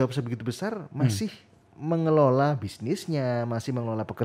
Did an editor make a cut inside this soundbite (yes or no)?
no